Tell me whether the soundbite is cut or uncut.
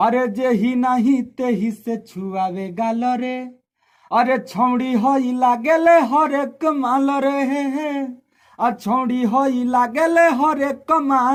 uncut